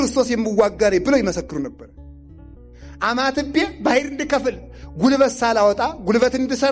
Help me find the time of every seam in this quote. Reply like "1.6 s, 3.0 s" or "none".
2.5 s

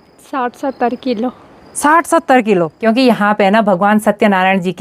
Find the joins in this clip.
2.8 s

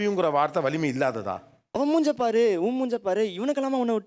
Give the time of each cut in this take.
1.7 s

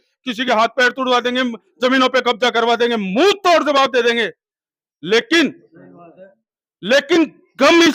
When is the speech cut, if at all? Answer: none

